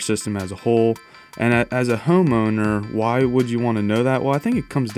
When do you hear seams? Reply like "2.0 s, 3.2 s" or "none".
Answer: none

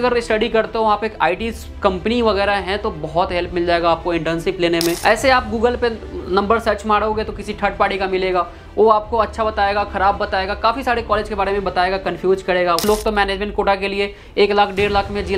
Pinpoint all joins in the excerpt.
5.0 s, 12.8 s

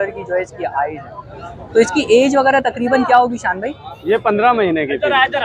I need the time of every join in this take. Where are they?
none

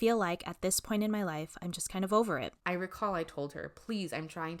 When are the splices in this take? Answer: 2.5 s

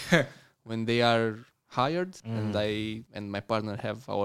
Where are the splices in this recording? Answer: 2.2 s, 3.1 s

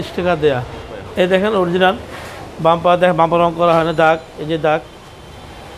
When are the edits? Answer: 1.0 s

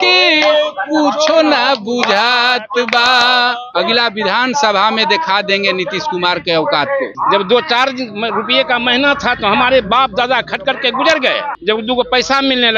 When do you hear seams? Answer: 3.6 s, 7.1 s, 11.5 s

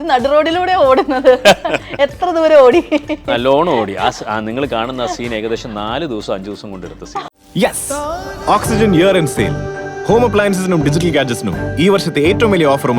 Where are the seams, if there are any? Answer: 7.3 s

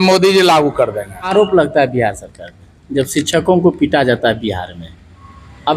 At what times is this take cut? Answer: 1.2 s

